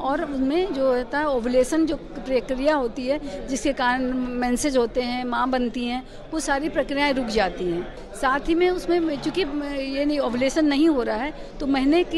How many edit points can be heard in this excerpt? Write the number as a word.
one